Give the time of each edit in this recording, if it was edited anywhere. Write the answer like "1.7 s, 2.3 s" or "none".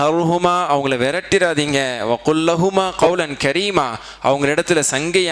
2.9 s